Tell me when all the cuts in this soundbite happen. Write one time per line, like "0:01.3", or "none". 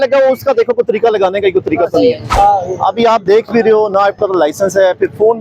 0:02.3